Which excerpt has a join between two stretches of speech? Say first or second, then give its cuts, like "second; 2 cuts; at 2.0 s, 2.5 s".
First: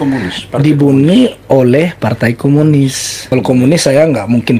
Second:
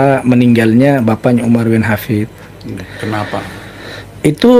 first; 1 cut; at 3.1 s